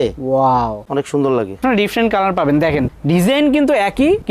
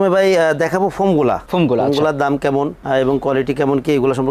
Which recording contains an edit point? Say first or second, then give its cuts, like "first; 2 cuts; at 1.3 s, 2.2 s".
first; 1 cut; at 1.6 s